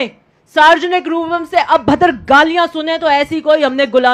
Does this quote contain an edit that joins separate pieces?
no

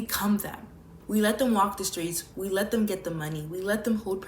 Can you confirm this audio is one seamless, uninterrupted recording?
no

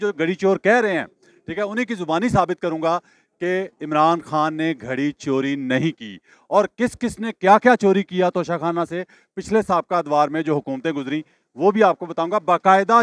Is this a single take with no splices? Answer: yes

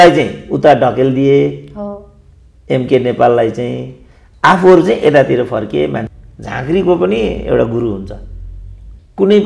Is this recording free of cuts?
no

